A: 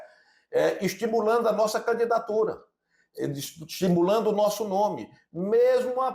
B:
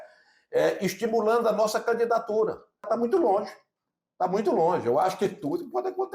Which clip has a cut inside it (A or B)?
B